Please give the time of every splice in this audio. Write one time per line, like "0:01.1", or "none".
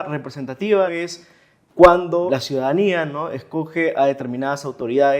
0:00.9
0:02.3